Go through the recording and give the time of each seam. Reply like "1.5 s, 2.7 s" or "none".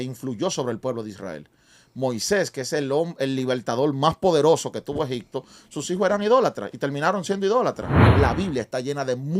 7.9 s